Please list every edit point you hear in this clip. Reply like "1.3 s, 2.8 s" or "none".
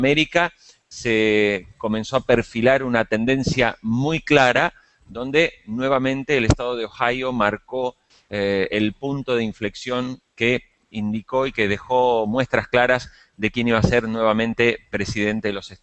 3.4 s